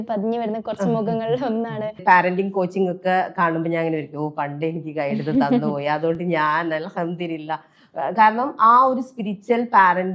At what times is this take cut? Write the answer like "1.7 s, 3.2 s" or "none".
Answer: 2.0 s